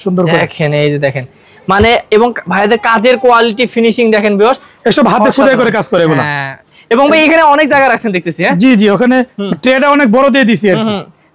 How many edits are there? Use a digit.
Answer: 0